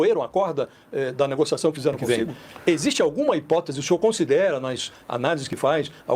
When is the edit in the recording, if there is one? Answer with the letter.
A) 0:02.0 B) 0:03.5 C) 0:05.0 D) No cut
A